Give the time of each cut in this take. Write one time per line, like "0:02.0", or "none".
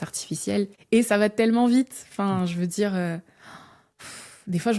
none